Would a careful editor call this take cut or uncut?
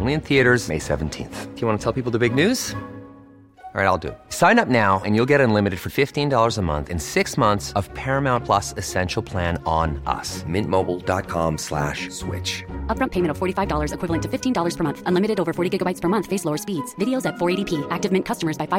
uncut